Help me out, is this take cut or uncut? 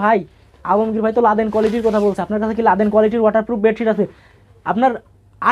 uncut